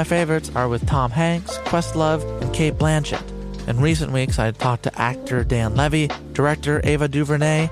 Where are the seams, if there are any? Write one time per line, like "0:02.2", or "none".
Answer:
none